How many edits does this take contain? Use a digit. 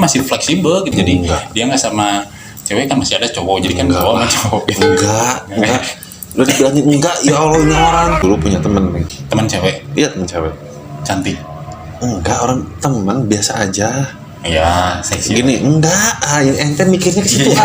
3